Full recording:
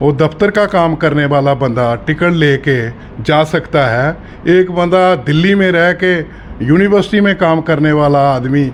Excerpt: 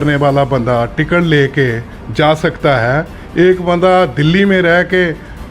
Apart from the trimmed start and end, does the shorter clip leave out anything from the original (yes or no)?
no